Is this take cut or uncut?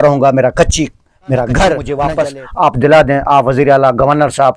cut